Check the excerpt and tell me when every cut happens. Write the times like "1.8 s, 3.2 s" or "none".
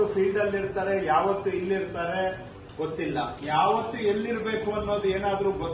3.4 s